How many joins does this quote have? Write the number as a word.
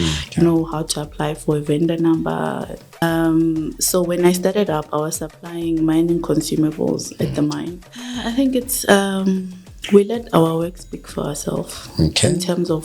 two